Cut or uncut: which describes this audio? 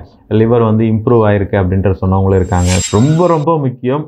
cut